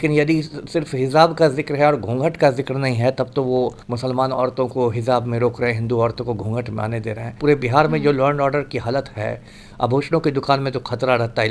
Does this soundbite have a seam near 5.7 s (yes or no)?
no